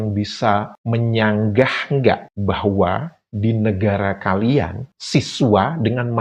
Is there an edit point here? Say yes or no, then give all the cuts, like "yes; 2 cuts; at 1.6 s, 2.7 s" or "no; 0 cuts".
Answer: no; 0 cuts